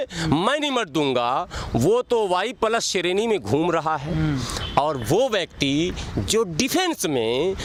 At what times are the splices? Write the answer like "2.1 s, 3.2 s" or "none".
none